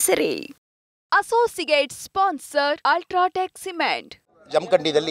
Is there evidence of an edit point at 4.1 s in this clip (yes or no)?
yes